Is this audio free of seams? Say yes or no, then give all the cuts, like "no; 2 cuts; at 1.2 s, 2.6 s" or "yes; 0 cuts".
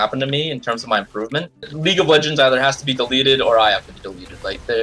no; 1 cut; at 1.7 s